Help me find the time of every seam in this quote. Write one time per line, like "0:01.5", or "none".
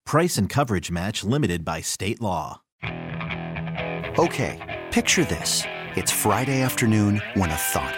0:02.8